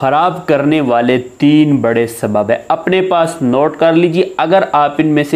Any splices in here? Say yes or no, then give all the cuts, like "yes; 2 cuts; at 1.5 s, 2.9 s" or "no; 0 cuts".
no; 0 cuts